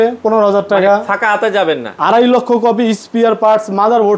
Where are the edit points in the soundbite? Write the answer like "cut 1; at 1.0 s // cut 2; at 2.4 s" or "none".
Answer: cut 1; at 1.9 s

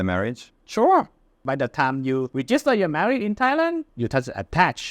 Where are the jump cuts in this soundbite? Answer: cut 1; at 1.4 s // cut 2; at 2.3 s // cut 3; at 3.9 s

